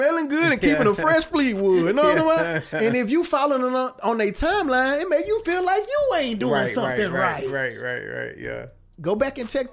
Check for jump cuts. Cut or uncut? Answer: cut